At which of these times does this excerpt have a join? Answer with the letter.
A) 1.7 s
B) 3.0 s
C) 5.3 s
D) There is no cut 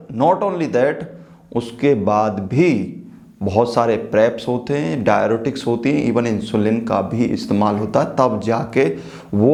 D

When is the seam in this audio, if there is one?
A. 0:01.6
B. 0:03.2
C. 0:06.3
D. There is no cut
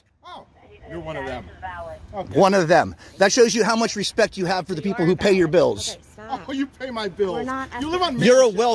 D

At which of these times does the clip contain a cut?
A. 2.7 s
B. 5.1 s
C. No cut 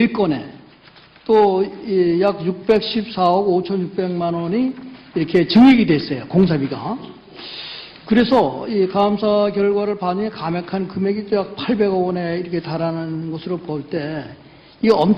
B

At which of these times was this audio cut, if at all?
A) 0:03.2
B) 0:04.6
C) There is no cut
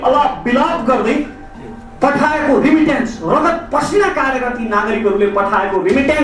C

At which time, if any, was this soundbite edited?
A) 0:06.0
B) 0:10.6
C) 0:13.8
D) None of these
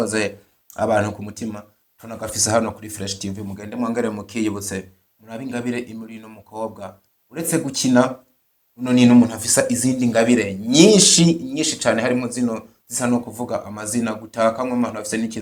D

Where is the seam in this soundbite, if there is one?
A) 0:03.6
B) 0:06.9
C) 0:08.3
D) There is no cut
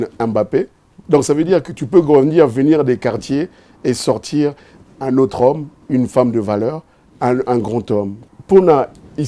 C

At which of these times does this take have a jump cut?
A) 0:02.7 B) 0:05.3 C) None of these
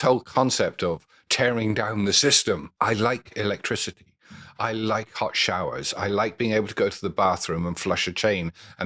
A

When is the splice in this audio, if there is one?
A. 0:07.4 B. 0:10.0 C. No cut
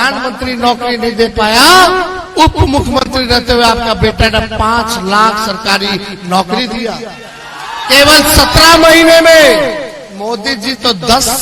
C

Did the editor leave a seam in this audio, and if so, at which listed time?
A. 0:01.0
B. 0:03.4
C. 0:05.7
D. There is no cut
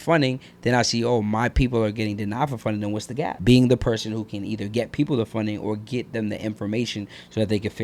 B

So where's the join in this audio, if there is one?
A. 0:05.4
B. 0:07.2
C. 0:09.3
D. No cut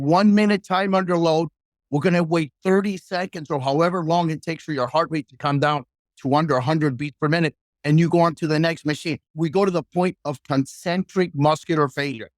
C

